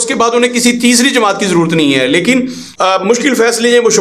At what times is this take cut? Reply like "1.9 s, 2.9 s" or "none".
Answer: 2.6 s